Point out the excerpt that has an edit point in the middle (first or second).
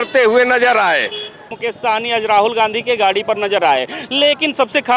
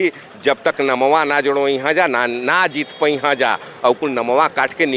first